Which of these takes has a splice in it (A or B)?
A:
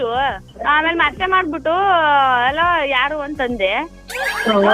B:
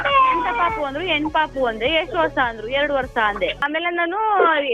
B